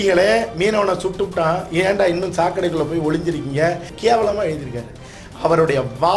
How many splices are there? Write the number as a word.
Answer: one